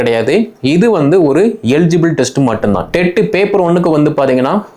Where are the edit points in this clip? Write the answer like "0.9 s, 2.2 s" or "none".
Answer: 2.9 s